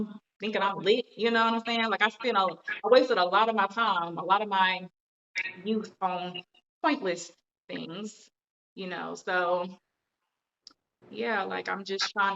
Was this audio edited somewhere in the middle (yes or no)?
no